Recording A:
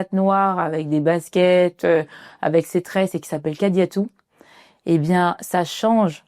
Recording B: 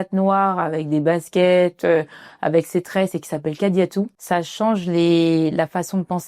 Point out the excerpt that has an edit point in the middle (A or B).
B